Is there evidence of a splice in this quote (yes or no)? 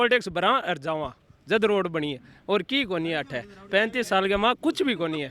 no